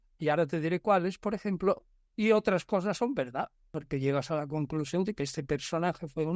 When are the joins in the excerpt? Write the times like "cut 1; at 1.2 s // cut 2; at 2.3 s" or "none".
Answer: cut 1; at 3.8 s